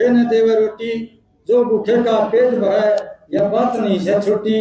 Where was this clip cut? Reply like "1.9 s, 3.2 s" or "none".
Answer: none